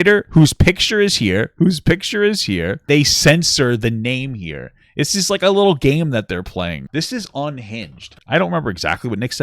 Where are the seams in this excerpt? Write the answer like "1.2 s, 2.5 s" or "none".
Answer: 2.8 s, 6.8 s, 8.2 s